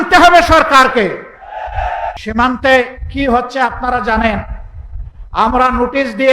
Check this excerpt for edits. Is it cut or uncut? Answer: cut